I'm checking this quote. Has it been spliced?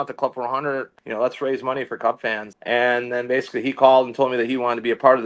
yes; 2 cuts; at 1.0 s, 2.5 s

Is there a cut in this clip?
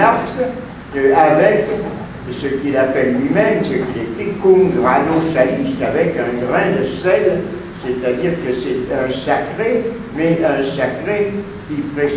no; 0 cuts

